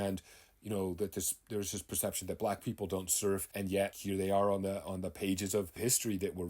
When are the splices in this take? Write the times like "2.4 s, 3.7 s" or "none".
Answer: 3.6 s, 5.7 s